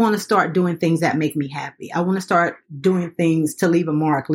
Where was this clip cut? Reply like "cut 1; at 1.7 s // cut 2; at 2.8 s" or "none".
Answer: none